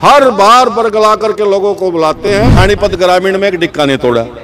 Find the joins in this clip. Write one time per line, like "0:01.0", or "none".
0:02.5